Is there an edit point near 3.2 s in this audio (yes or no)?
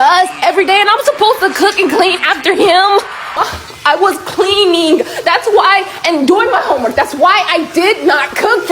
yes